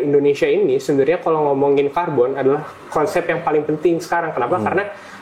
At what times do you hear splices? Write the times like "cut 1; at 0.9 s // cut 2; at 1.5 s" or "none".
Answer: none